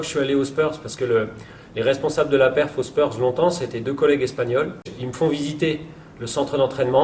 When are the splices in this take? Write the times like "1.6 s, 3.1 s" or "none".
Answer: 5.0 s